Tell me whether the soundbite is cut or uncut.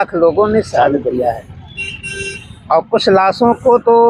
uncut